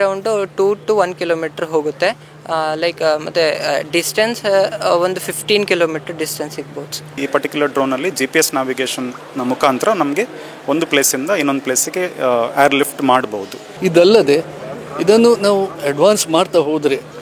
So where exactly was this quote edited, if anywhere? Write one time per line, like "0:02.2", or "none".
0:07.2
0:13.7